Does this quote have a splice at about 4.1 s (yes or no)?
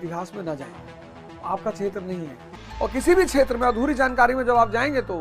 no